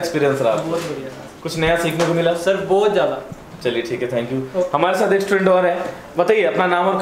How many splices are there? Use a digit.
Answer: 0